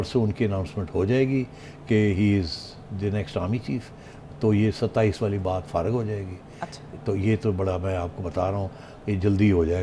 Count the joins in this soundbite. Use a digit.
0